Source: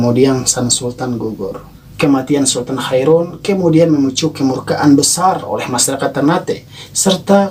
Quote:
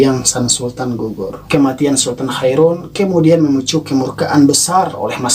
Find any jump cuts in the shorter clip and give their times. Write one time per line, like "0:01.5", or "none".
0:01.3